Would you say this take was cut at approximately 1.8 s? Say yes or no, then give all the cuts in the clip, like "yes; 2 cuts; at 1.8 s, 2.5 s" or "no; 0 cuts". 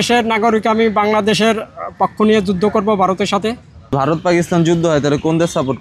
no; 1 cut; at 3.7 s